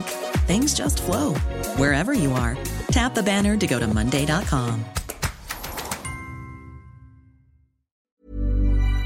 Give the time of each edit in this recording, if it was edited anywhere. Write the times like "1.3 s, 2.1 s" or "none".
8.0 s